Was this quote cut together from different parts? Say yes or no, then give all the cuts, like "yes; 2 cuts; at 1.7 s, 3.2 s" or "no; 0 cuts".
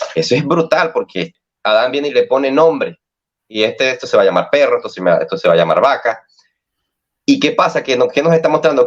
yes; 1 cut; at 1.5 s